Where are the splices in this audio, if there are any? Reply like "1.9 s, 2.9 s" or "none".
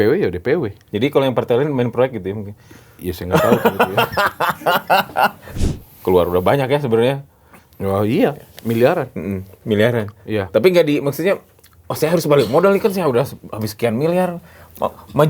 5.5 s